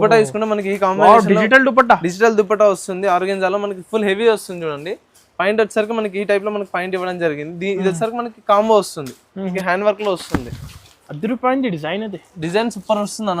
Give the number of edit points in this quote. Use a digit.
1